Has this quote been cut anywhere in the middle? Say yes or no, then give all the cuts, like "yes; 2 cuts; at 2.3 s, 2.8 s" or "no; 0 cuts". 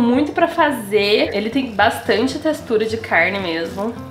yes; 1 cut; at 1.3 s